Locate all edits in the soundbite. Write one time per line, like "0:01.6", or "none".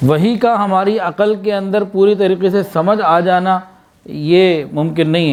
none